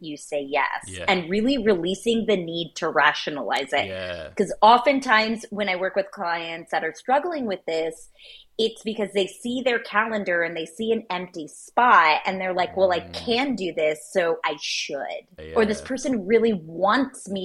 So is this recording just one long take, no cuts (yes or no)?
no